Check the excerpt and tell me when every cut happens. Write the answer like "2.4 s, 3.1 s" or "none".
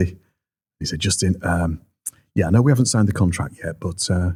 none